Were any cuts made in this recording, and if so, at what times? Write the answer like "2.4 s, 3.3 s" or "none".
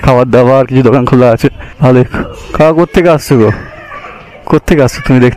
1.7 s